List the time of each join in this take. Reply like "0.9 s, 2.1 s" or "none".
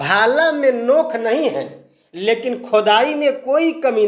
none